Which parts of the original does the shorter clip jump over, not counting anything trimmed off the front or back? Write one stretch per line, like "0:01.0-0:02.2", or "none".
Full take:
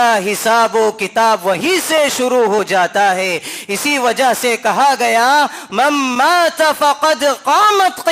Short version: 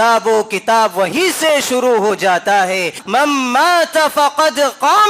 0:03.5-0:05.6